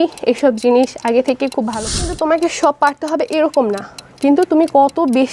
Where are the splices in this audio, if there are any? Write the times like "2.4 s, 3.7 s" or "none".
2.0 s